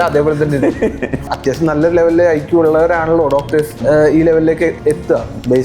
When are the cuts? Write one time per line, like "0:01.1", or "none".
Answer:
0:01.3
0:03.8